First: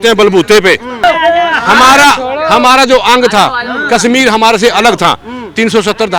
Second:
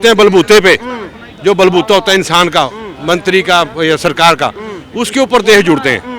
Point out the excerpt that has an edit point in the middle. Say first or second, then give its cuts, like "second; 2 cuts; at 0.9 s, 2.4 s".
first; 1 cut; at 1.0 s